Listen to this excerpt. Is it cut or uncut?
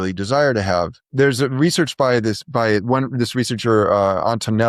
cut